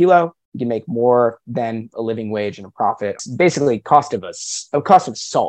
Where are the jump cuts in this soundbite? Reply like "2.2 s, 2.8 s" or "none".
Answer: 3.2 s

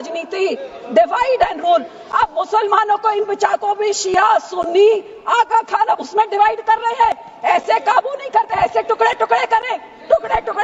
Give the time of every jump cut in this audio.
none

